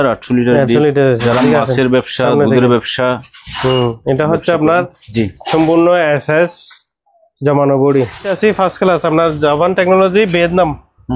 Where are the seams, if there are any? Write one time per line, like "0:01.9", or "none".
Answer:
0:08.3